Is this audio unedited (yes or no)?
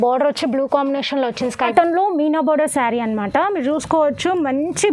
no